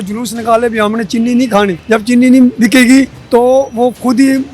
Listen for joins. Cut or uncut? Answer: cut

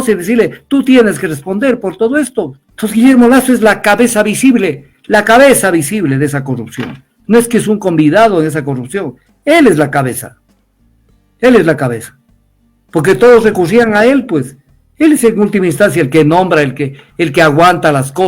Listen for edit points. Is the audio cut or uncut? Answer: cut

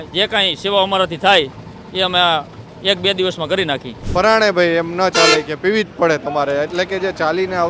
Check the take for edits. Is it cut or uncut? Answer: cut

